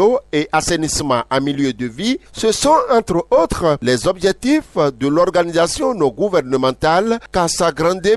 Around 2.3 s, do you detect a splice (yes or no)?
yes